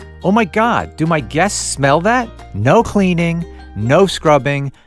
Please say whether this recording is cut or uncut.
cut